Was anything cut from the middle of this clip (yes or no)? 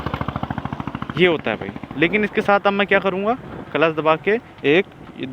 yes